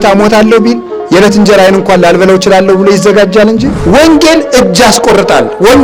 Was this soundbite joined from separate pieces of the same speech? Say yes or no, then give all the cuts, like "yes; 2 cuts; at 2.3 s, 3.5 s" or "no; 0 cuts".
yes; 2 cuts; at 0.9 s, 4.0 s